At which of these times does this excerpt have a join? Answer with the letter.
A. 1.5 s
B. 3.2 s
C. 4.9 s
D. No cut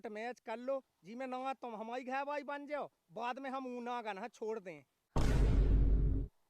C